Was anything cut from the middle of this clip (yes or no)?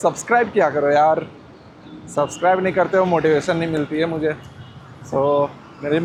no